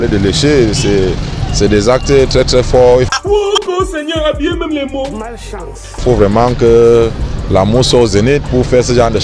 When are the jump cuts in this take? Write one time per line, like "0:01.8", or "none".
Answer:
none